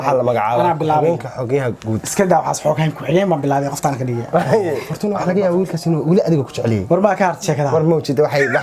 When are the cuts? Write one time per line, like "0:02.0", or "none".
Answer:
0:04.9